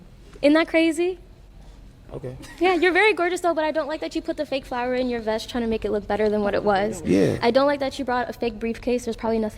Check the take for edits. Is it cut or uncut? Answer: cut